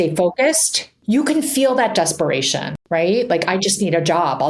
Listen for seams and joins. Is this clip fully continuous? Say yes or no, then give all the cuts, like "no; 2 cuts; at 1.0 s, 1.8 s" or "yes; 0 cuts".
no; 2 cuts; at 0.9 s, 2.7 s